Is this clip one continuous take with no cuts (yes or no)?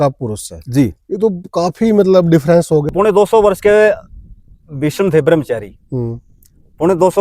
no